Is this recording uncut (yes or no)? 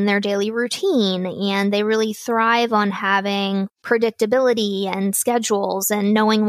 no